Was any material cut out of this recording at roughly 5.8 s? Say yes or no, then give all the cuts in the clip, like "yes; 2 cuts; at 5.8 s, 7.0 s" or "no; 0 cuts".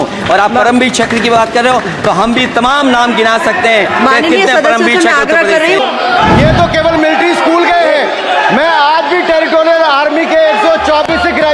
yes; 1 cut; at 5.8 s